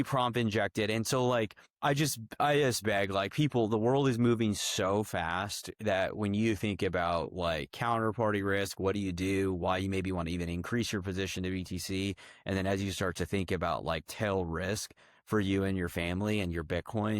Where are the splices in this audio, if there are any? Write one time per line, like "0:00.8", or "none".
0:01.6